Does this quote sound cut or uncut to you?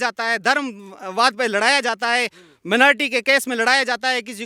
uncut